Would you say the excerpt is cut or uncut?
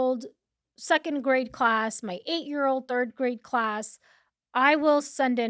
uncut